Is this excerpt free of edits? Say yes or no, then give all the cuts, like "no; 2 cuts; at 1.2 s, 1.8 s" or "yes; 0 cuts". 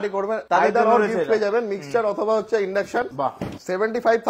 yes; 0 cuts